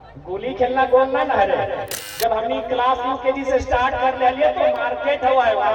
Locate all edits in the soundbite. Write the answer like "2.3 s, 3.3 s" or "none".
2.0 s